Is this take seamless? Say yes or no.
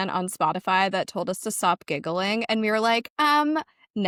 yes